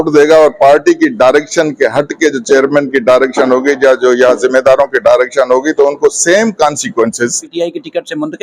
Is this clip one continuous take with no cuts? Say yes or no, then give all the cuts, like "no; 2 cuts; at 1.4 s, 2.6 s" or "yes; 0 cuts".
no; 1 cut; at 7.4 s